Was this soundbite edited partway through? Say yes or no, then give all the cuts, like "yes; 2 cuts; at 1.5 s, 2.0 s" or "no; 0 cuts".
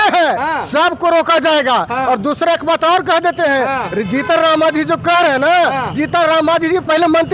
no; 0 cuts